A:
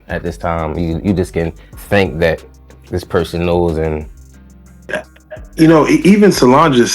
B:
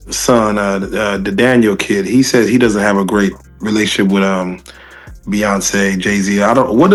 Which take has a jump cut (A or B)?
A